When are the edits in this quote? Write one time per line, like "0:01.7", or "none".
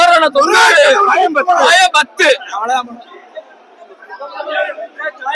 none